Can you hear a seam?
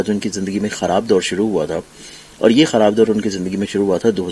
no; 0 cuts

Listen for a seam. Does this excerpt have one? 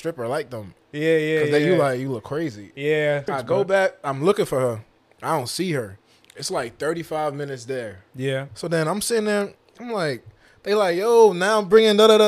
yes; 2 cuts; at 3.3 s, 8.5 s

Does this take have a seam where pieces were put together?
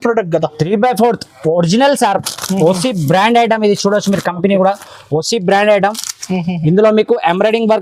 no; 0 cuts

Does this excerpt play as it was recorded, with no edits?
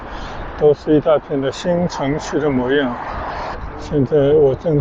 no; 1 cut; at 3.6 s

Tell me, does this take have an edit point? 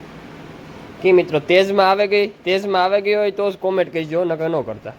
no; 0 cuts

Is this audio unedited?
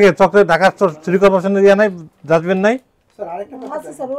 yes; 0 cuts

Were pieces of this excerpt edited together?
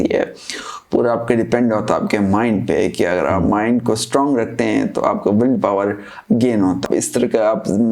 yes; 1 cut; at 6.8 s

